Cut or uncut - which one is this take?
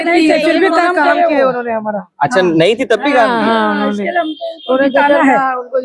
uncut